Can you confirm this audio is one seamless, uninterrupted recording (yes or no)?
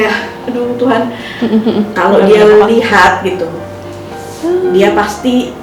yes